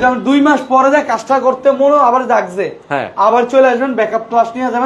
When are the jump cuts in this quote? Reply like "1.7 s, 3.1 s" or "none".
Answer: none